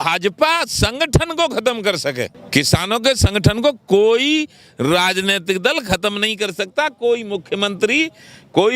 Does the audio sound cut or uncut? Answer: cut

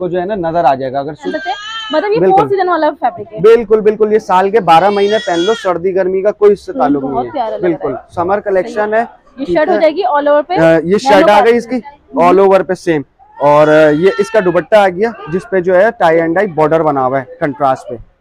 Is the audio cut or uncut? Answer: cut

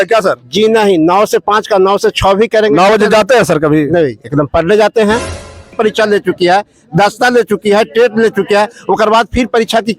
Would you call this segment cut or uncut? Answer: cut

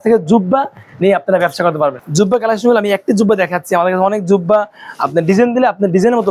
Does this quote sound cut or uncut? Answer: uncut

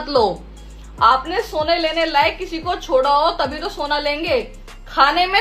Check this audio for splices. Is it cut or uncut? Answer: uncut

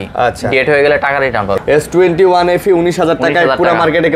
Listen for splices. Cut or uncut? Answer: cut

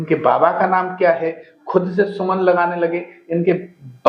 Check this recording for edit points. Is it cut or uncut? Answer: uncut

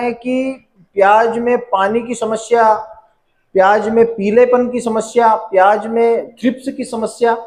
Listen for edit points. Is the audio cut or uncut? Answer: uncut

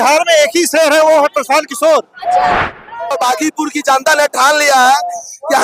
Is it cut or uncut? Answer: cut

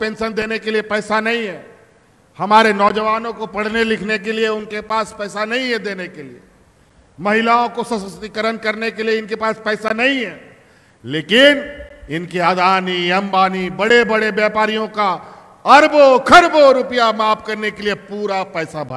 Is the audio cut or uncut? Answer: uncut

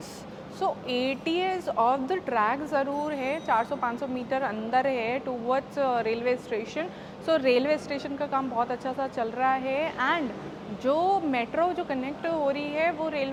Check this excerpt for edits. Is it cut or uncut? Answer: uncut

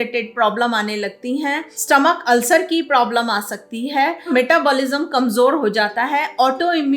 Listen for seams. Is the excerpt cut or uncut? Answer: cut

